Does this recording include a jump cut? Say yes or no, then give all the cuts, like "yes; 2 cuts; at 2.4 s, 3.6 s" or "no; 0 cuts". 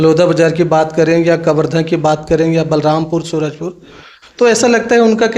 no; 0 cuts